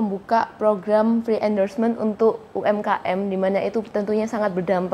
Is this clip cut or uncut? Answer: uncut